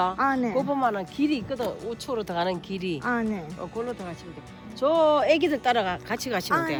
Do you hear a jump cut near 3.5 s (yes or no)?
no